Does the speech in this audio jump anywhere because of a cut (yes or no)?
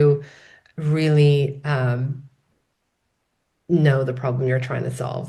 no